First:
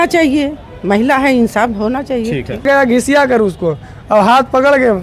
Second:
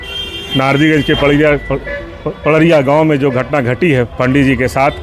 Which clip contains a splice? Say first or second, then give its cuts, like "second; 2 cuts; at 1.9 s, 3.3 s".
first; 1 cut; at 2.6 s